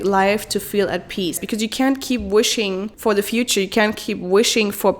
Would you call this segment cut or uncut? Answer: cut